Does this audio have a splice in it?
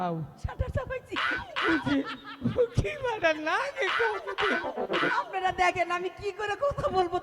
no; 0 cuts

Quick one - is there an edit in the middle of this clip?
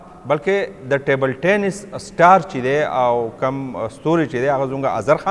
no; 0 cuts

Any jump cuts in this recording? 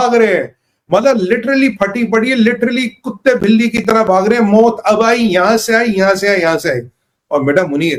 no; 0 cuts

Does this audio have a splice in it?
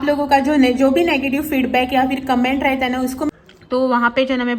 yes; 1 cut; at 3.3 s

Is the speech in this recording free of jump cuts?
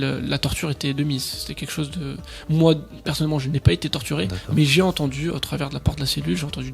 yes; 0 cuts

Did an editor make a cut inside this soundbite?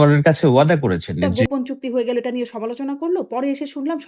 yes; 1 cut; at 1.3 s

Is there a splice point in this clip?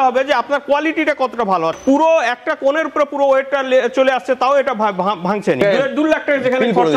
yes; 2 cuts; at 1.8 s, 5.6 s

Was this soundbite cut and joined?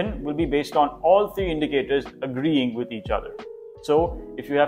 no; 0 cuts

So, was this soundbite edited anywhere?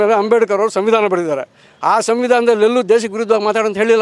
no; 0 cuts

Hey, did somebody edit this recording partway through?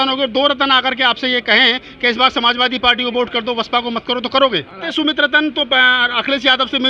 yes; 1 cut; at 4.8 s

